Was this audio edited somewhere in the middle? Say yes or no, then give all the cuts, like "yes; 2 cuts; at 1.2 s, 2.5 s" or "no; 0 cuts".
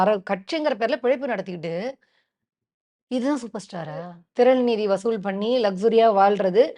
yes; 1 cut; at 4.2 s